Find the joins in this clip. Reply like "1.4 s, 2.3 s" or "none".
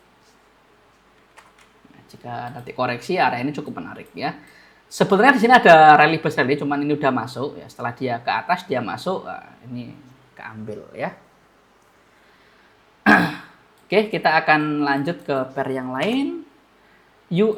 none